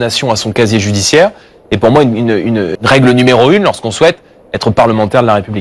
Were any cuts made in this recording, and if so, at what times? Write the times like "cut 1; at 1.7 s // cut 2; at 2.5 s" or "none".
cut 1; at 2.7 s